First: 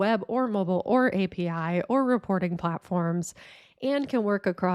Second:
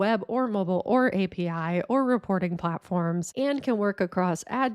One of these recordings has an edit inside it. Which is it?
second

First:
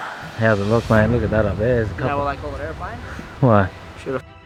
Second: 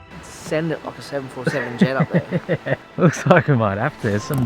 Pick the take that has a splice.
second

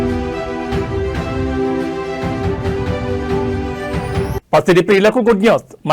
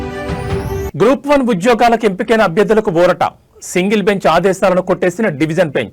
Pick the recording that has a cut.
first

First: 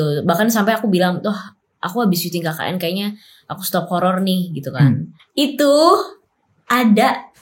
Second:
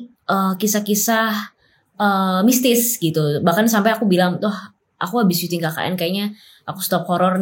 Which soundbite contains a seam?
first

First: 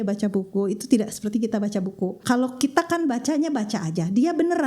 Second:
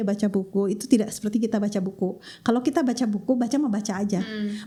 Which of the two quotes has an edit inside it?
first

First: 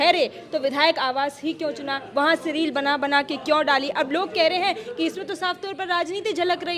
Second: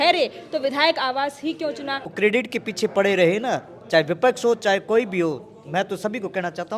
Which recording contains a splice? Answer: second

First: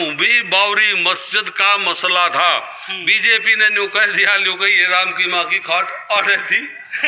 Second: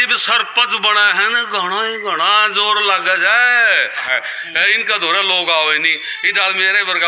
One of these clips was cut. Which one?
second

